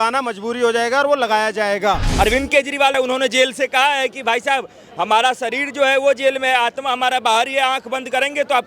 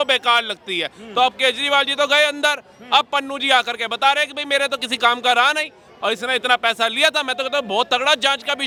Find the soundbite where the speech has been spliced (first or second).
first